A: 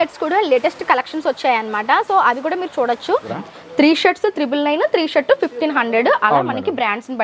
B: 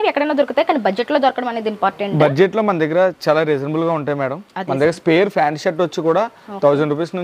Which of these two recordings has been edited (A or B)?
A